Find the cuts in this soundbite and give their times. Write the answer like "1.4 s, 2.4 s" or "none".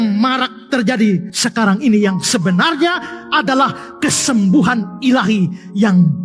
none

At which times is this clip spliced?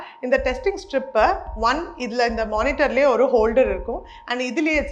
none

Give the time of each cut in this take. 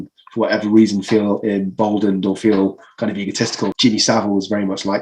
3.7 s

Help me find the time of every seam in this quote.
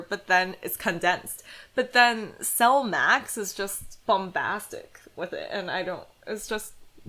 3.9 s, 6.1 s

